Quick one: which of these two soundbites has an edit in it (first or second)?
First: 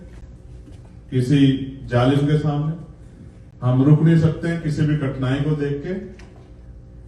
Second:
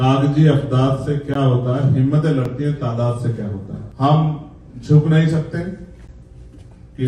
second